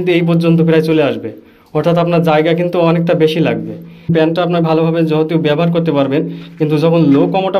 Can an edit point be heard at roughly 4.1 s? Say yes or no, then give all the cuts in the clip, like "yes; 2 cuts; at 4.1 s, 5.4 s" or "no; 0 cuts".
yes; 1 cut; at 4.1 s